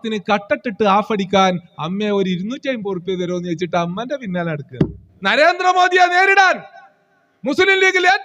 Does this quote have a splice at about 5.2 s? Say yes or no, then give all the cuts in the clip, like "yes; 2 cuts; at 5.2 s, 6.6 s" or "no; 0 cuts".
yes; 1 cut; at 5.2 s